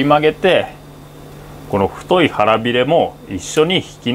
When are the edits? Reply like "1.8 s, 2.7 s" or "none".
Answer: none